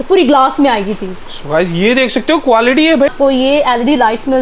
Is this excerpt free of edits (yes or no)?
no